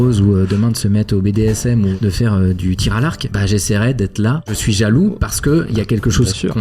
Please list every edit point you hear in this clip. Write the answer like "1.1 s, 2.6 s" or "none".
1.9 s, 3.2 s, 4.6 s